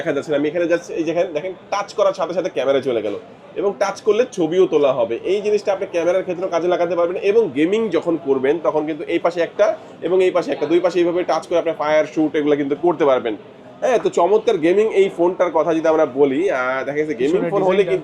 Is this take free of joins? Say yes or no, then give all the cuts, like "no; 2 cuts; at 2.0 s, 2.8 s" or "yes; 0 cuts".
yes; 0 cuts